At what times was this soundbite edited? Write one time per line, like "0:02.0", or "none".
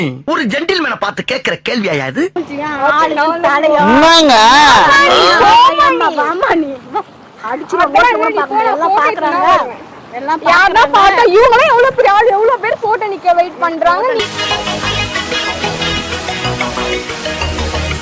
0:02.4